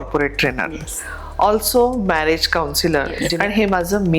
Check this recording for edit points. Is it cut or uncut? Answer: cut